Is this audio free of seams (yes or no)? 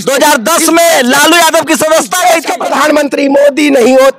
no